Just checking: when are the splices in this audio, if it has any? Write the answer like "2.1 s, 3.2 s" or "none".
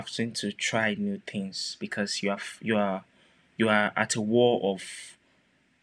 none